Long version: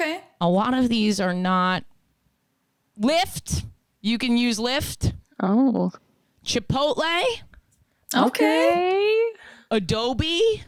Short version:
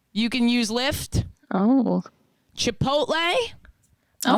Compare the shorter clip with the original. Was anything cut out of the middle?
no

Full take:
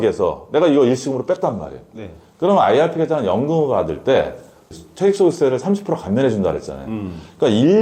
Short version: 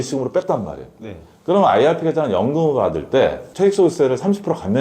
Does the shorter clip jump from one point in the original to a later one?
yes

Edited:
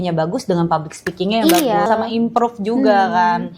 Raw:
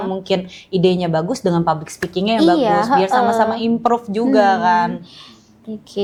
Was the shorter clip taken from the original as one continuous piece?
no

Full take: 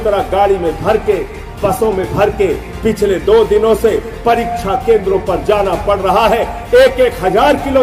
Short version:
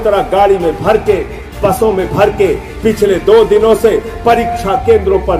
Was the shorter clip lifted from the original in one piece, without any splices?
yes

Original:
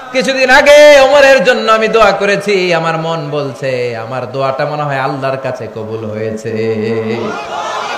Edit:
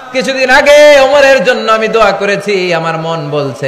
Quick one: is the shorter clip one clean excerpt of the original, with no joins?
yes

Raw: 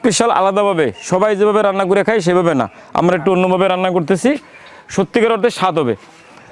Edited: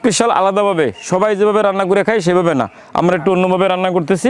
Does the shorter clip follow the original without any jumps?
yes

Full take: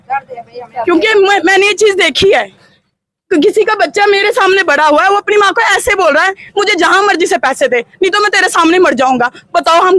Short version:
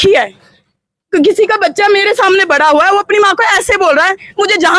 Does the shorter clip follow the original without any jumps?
yes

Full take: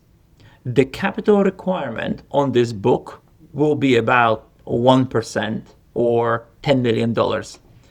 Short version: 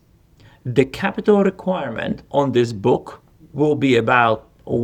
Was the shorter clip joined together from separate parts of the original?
no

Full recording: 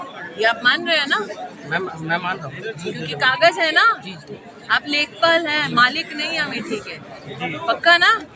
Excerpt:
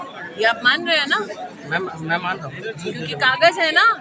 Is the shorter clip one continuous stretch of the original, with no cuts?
yes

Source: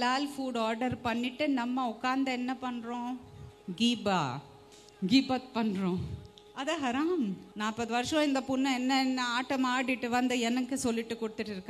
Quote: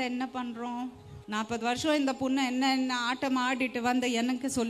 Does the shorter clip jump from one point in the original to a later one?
yes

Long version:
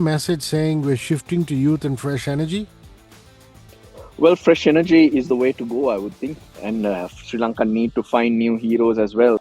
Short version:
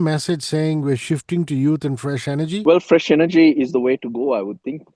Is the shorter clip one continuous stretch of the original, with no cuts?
no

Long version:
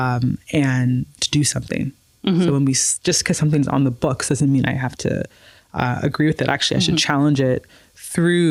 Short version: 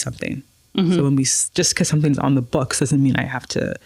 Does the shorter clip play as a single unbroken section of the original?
yes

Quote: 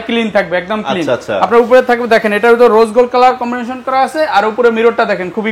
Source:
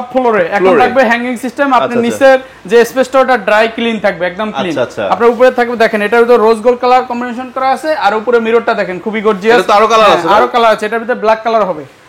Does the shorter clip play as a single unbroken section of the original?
yes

